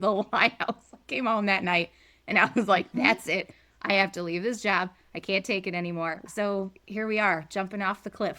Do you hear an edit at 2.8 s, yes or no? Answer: no